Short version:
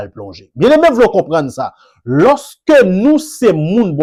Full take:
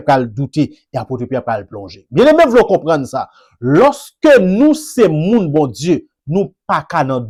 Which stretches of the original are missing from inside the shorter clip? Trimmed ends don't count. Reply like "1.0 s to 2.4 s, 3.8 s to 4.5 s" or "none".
none